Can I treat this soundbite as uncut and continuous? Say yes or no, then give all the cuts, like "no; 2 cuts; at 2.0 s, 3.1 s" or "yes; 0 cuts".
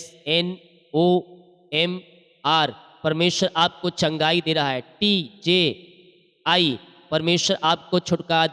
yes; 0 cuts